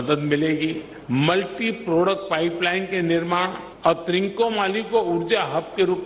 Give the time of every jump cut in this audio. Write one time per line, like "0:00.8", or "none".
0:00.9
0:03.6